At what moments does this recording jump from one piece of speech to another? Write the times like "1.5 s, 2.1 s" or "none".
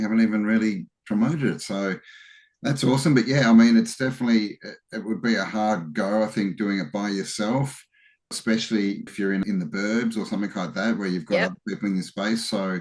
8.3 s, 9.4 s